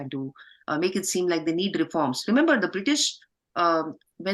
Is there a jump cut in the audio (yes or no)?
no